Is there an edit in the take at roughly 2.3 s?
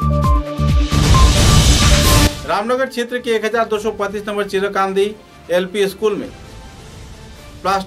yes; 1 cut; at 2.3 s

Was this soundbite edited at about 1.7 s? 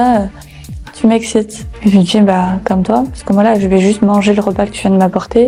no; 0 cuts

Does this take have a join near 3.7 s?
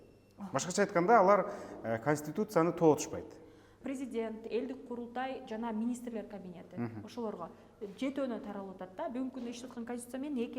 yes; 1 cut; at 3.7 s

